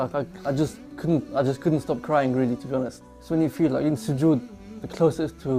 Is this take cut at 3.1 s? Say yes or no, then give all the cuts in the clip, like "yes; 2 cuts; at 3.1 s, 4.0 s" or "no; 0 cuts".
yes; 1 cut; at 3.1 s